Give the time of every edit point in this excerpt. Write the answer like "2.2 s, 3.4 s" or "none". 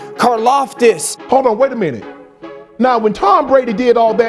1.1 s